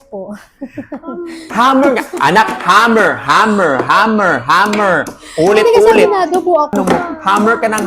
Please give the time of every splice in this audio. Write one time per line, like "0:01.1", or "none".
0:06.8